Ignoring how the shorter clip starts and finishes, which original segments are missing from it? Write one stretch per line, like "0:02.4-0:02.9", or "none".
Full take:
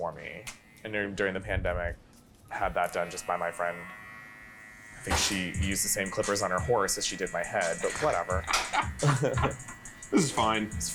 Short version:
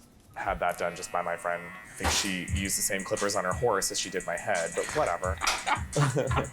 0:03.9-0:04.9